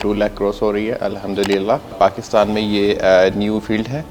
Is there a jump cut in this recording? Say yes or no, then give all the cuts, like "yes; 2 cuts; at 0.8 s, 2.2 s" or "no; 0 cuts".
yes; 1 cut; at 1.9 s